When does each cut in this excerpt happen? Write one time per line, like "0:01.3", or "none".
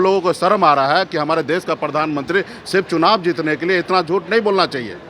none